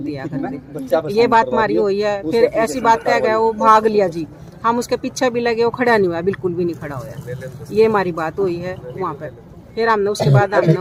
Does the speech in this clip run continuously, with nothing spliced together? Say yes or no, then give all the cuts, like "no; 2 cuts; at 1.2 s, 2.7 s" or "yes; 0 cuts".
yes; 0 cuts